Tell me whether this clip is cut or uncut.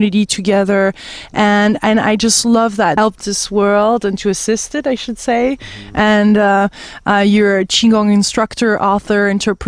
uncut